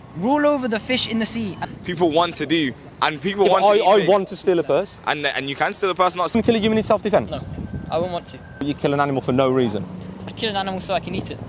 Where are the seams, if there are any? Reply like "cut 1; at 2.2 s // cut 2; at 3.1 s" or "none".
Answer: cut 1; at 1.7 s // cut 2; at 6.3 s // cut 3; at 8.6 s